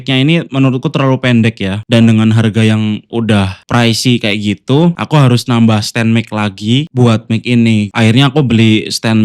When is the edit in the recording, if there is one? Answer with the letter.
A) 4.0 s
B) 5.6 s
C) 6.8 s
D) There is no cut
D